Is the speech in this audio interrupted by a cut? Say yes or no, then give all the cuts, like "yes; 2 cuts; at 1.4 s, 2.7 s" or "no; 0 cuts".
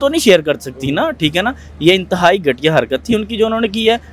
no; 0 cuts